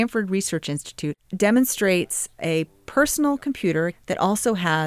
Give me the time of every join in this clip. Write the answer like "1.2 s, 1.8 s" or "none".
1.2 s, 2.4 s, 4.0 s